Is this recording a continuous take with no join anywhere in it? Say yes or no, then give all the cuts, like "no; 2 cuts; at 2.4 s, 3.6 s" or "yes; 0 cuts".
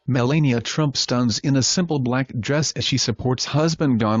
no; 1 cut; at 0.9 s